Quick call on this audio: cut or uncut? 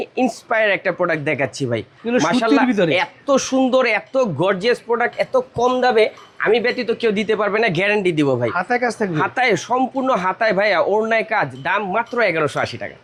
uncut